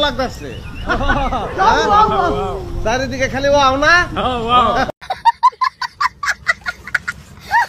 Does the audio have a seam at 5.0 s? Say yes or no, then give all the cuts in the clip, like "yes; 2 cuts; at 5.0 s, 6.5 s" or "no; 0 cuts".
no; 0 cuts